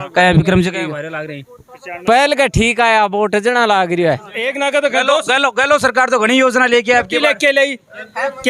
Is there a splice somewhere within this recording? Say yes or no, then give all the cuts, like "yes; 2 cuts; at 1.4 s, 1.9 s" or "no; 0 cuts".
yes; 1 cut; at 4.4 s